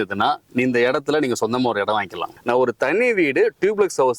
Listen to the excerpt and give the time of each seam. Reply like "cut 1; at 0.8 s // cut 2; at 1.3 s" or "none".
cut 1; at 2.3 s